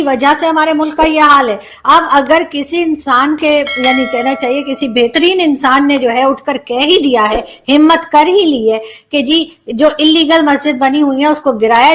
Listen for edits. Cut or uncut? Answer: uncut